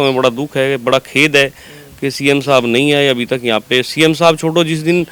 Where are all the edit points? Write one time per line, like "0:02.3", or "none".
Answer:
none